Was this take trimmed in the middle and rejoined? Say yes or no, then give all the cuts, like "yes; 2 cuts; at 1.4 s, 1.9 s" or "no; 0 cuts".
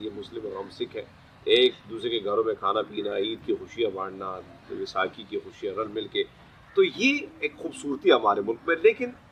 no; 0 cuts